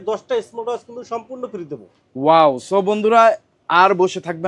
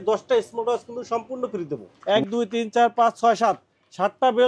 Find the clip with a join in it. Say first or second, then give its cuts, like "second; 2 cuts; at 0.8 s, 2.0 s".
second; 1 cut; at 1.9 s